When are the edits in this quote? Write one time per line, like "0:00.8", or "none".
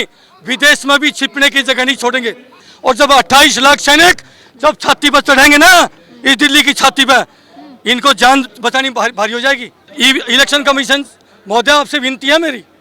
0:02.7
0:09.9